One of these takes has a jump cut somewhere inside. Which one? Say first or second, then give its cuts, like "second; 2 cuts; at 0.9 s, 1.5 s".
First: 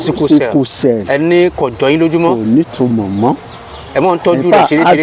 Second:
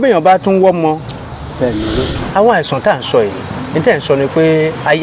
second; 1 cut; at 2.2 s